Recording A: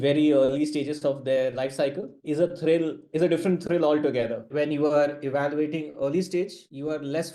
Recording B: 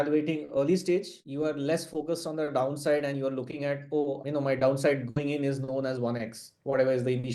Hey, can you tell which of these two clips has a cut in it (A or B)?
A